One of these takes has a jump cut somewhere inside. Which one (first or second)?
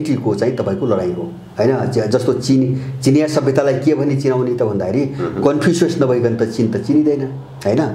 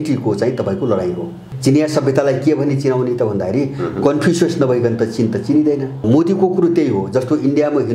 second